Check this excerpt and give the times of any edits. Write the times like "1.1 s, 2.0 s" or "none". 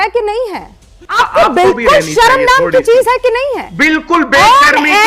1.0 s